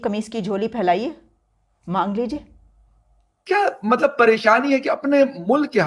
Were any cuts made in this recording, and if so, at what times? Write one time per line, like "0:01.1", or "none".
0:02.9